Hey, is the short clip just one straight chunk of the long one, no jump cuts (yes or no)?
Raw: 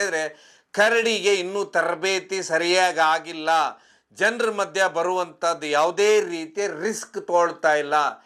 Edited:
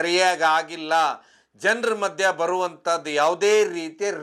yes